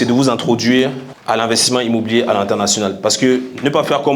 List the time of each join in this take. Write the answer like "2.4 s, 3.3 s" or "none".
1.1 s